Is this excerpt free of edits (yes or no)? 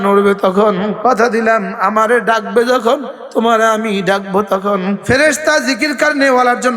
no